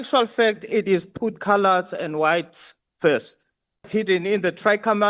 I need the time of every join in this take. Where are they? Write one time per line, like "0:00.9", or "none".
0:03.9